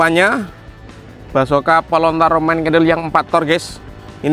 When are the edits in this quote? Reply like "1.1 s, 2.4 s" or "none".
none